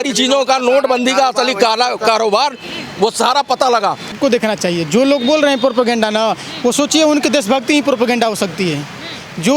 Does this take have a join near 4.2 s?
yes; 1 cut; at 4.2 s

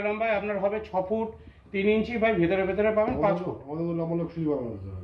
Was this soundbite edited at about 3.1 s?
no; 0 cuts

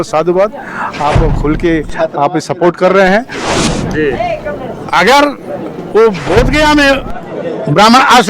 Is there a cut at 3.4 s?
yes; 1 cut; at 3.4 s

